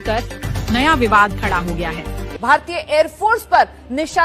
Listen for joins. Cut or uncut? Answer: cut